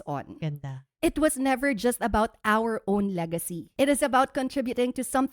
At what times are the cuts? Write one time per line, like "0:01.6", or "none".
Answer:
0:00.8
0:03.6